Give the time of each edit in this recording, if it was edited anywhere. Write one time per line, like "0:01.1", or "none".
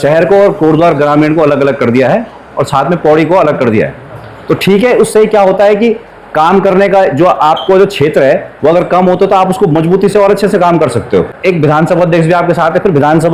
none